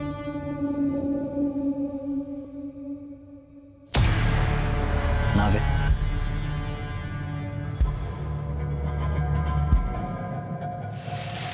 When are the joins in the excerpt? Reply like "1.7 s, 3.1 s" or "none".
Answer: none